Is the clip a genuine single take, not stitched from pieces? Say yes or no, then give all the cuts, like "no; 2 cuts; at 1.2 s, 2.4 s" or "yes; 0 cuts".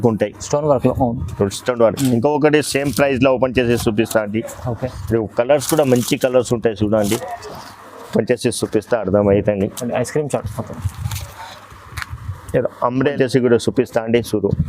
no; 1 cut; at 13.1 s